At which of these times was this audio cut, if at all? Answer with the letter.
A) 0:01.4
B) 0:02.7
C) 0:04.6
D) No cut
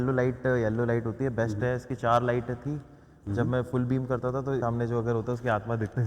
C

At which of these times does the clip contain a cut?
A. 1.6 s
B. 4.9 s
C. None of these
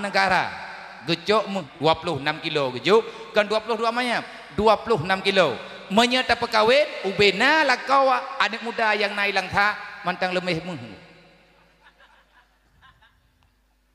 A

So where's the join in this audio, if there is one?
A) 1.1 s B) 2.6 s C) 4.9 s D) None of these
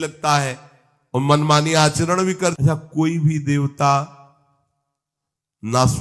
B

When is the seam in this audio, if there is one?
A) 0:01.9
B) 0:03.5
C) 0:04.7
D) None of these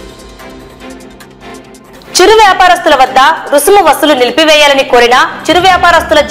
A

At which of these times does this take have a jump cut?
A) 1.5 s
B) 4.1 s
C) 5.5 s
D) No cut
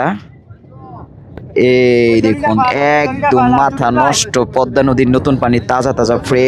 A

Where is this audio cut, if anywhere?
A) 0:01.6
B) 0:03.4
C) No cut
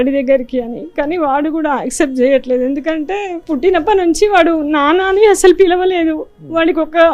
B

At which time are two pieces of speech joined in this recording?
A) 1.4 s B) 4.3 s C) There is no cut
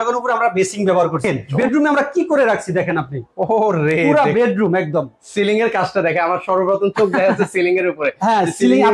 A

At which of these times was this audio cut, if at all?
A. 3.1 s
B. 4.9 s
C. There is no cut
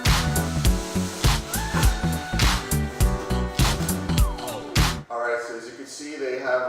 B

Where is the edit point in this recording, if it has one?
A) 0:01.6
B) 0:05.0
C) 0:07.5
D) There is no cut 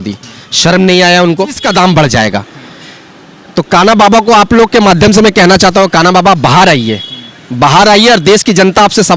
A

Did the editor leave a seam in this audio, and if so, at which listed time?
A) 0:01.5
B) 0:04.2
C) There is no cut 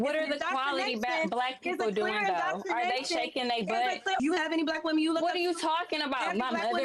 B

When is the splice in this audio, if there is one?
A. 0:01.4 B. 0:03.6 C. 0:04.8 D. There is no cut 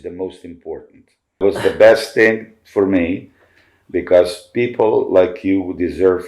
A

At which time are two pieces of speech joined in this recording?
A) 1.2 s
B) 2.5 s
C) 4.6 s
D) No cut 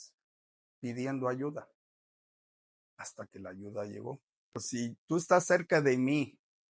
C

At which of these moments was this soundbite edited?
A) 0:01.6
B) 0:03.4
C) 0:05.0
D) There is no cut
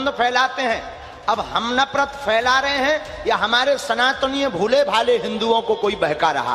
D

